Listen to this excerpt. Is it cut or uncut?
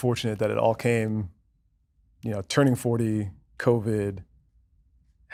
uncut